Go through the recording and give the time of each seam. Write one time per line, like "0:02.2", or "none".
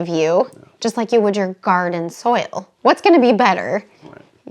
0:02.7